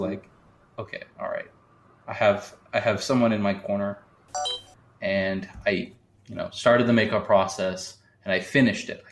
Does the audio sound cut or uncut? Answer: cut